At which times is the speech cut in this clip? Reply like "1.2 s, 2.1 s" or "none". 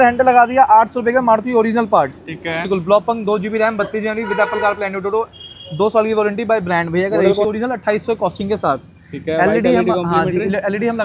2.7 s, 7.4 s